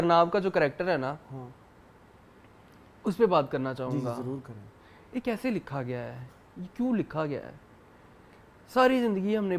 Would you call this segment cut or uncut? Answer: uncut